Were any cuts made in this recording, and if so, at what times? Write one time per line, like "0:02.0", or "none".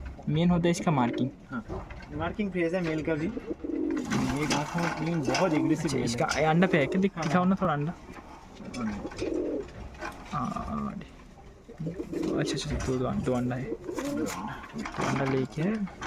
none